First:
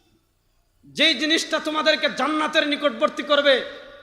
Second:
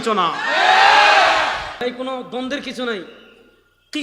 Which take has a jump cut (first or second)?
second